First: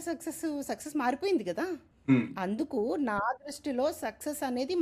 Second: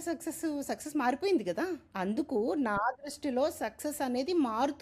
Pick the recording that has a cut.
second; 1 cut; at 1.9 s

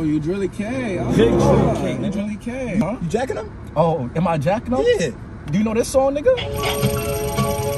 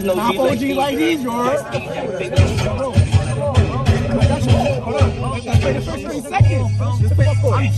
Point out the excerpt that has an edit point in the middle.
first; 1 cut; at 2.8 s

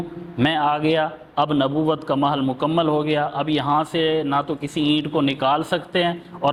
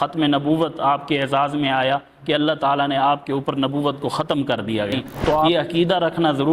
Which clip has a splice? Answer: second; 1 cut; at 5.5 s

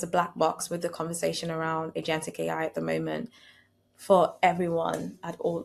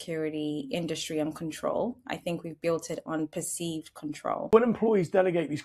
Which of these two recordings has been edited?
second; 1 cut; at 4.5 s

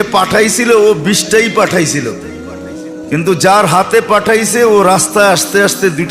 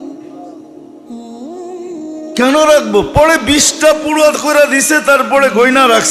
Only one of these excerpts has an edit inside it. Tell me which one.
second; 1 cut; at 2.3 s

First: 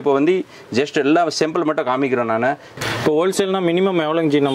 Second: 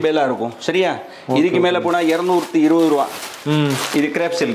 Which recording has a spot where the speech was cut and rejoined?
first; 1 cut; at 2.7 s

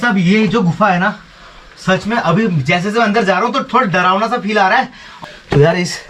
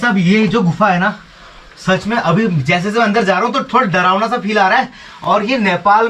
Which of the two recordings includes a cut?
first; 1 cut; at 5.0 s

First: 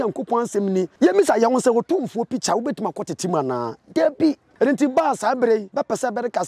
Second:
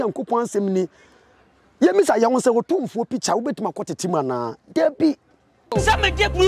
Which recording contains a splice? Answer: first; 3 cuts; at 0.9 s, 4.5 s, 5.7 s

